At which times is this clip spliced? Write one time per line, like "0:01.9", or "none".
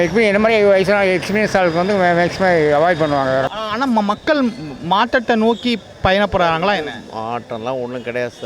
0:03.6